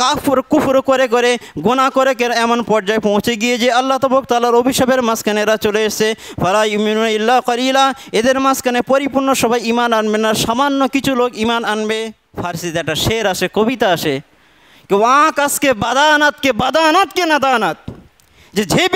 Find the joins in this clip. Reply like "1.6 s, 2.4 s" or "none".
12.2 s